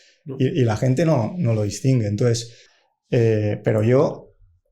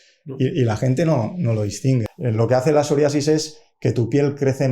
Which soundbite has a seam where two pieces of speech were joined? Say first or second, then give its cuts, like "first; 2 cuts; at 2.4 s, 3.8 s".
second; 1 cut; at 2.1 s